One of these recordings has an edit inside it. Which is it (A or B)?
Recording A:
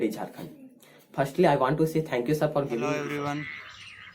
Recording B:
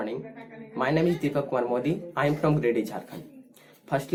A